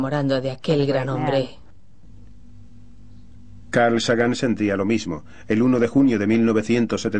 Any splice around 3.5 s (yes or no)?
no